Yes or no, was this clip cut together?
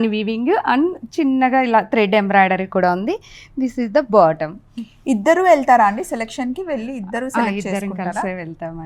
no